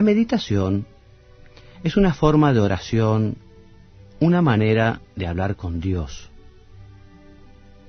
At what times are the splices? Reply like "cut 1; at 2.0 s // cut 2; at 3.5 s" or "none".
cut 1; at 4.7 s